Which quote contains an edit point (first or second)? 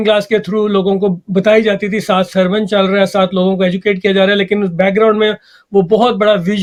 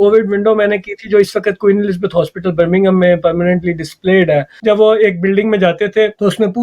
second